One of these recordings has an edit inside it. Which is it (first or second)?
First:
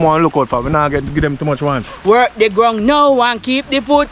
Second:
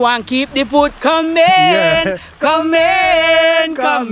first